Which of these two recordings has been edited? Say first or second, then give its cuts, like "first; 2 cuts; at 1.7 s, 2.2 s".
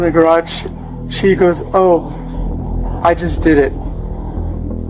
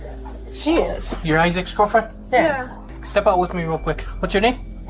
second; 1 cut; at 2.9 s